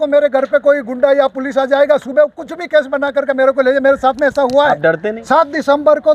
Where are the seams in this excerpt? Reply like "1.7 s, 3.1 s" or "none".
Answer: 5.1 s